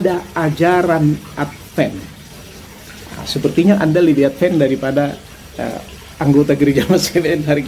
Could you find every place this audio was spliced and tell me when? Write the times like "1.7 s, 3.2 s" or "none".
none